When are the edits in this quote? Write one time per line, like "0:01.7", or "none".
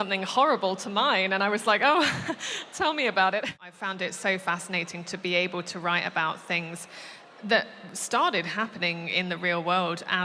0:03.6